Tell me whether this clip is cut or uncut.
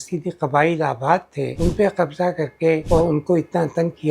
cut